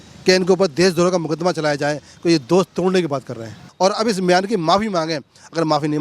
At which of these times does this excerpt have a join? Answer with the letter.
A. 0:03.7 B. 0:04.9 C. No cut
A